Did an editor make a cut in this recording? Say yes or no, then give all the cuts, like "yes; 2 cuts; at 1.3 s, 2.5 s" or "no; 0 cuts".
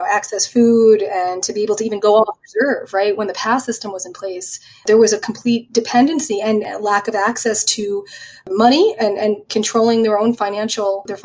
no; 0 cuts